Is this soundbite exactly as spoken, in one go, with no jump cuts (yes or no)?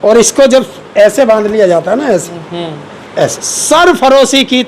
no